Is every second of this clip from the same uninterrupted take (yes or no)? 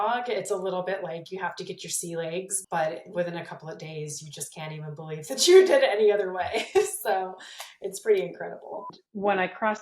no